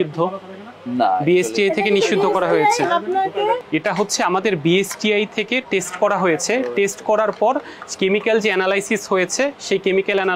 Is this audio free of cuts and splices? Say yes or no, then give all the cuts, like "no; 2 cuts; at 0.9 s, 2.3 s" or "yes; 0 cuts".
no; 1 cut; at 3.6 s